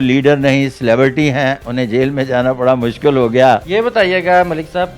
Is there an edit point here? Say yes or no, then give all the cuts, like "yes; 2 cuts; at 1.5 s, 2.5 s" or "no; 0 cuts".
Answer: yes; 1 cut; at 3.6 s